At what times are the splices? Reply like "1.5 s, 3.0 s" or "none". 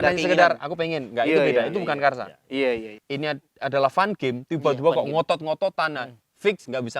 3.0 s